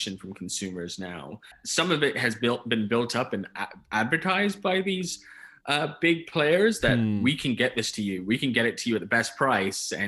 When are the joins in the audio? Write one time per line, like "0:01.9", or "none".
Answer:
0:01.6